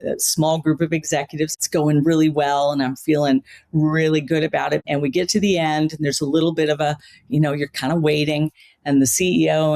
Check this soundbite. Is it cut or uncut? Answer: cut